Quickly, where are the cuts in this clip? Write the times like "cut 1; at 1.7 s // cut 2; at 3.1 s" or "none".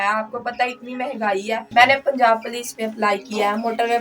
cut 1; at 1.6 s